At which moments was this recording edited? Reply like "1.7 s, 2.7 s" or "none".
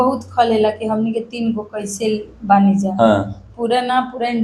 none